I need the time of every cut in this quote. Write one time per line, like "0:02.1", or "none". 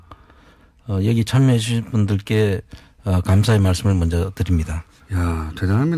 0:02.7